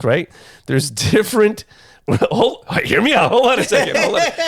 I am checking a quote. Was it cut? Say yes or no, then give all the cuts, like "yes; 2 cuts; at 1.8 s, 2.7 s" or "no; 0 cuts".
no; 0 cuts